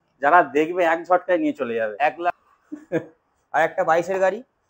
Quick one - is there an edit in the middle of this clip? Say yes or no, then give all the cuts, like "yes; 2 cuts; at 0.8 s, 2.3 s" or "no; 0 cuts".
yes; 1 cut; at 2.4 s